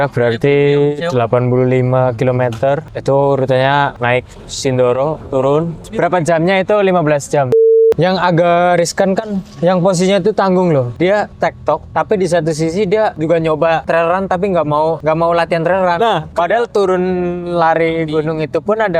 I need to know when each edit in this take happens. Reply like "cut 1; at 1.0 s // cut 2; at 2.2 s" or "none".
cut 1; at 2.9 s // cut 2; at 4.0 s // cut 3; at 5.8 s // cut 4; at 7.7 s // cut 5; at 11.3 s // cut 6; at 13.2 s // cut 7; at 13.8 s // cut 8; at 15.0 s // cut 9; at 16.3 s